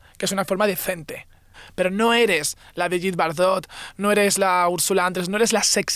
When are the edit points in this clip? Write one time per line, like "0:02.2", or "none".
0:01.6